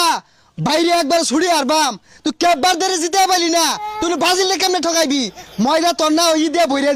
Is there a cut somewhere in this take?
no; 0 cuts

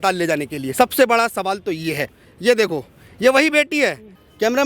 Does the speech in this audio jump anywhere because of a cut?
yes; 1 cut; at 2.1 s

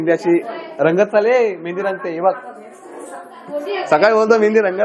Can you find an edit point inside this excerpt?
no; 0 cuts

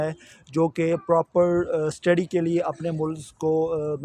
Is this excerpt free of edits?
yes; 0 cuts

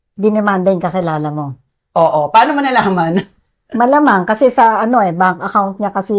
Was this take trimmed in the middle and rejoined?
no; 0 cuts

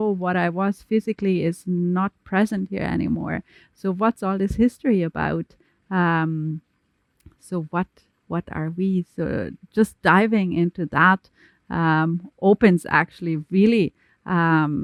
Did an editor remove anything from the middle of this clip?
no; 0 cuts

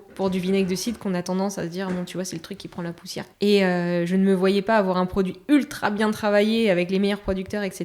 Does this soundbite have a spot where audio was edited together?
yes; 1 cut; at 3.3 s

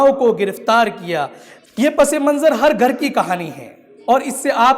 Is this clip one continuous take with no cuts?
no; 1 cut; at 1.4 s

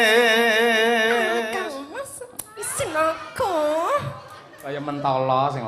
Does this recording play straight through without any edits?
yes; 0 cuts

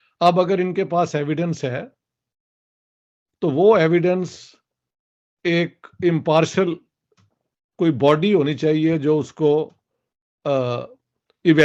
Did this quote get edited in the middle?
no; 0 cuts

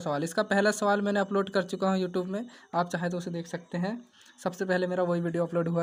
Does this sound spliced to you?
no; 0 cuts

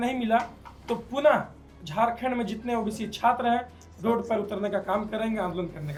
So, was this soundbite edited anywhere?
no; 0 cuts

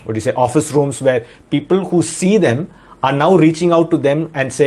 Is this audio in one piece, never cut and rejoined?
yes; 0 cuts

